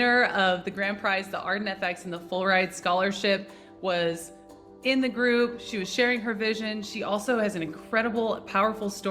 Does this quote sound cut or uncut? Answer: uncut